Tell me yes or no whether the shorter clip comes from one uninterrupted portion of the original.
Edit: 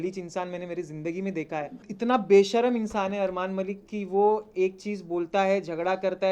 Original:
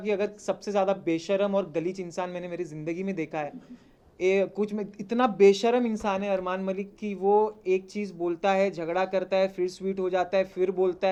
no